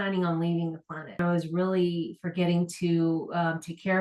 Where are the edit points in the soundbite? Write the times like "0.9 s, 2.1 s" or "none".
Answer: 1.2 s